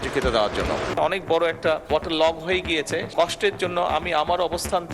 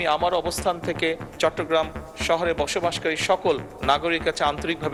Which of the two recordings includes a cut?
first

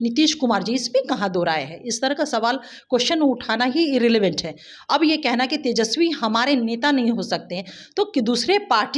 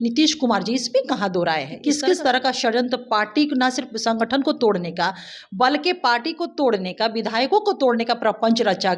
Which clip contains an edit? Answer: second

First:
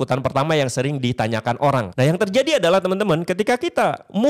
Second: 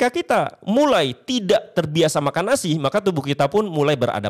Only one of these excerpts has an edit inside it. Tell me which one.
first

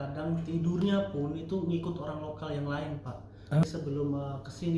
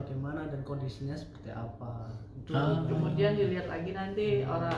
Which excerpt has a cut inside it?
first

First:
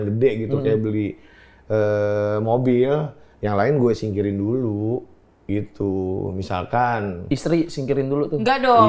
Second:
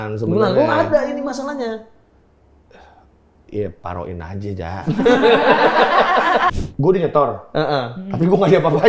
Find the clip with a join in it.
second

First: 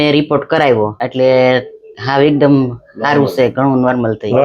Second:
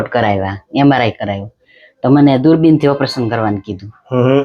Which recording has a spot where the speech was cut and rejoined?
first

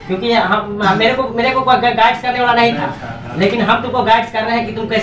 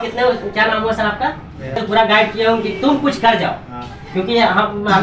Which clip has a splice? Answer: second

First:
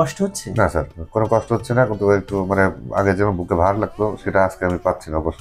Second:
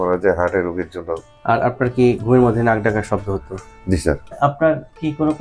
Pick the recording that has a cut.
second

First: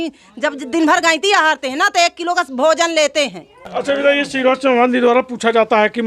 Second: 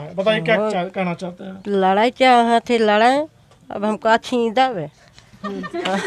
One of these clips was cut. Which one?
first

